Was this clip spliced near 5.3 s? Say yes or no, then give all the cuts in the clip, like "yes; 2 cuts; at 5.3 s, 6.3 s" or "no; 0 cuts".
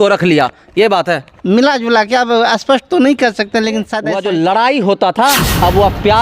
no; 1 cut; at 4.0 s